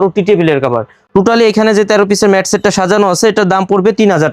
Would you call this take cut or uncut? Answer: uncut